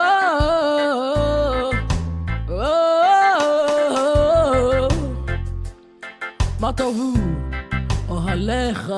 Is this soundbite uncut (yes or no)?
no